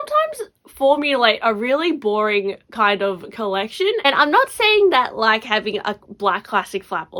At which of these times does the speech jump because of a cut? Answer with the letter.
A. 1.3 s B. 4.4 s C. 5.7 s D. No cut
D